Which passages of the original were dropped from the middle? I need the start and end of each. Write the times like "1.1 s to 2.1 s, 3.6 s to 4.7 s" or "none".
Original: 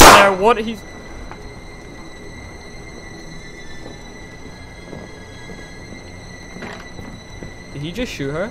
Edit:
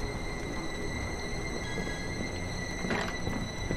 3.0 s to 5.3 s